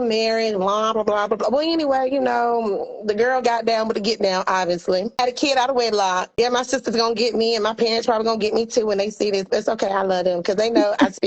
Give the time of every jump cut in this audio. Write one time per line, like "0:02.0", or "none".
0:05.2
0:06.3